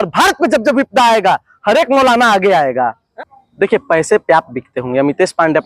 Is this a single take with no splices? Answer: no; 1 cut; at 3.1 s

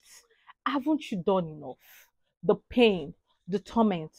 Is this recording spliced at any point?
no; 0 cuts

